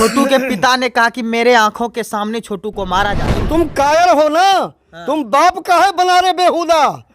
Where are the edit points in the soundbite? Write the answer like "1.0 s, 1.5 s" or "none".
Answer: 3.4 s